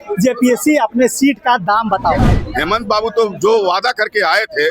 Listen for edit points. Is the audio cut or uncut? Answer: cut